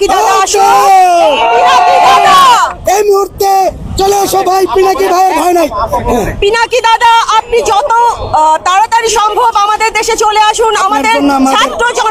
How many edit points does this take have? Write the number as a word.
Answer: zero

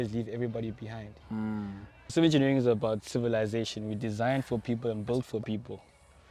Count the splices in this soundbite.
one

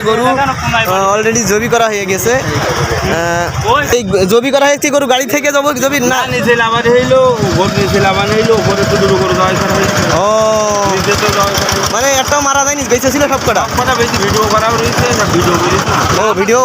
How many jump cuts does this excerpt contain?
one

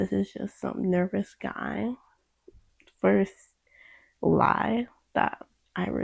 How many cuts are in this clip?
zero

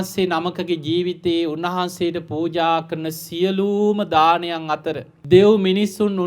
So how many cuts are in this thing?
one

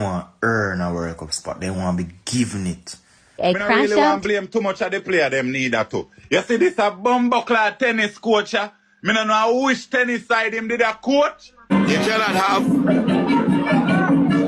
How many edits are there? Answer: two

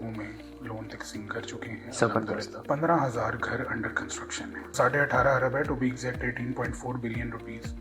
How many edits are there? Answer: two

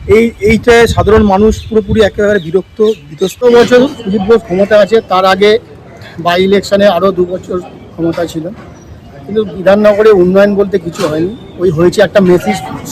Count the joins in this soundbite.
one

